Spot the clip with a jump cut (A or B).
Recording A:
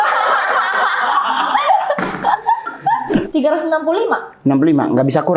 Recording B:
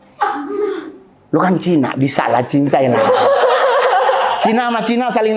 A